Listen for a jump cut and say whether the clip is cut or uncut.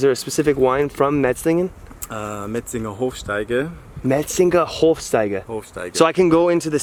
uncut